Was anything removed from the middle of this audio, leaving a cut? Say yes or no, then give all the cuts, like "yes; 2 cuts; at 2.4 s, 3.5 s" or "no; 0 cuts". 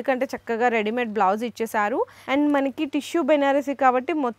yes; 1 cut; at 2.2 s